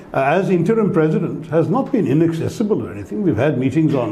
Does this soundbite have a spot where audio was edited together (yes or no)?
no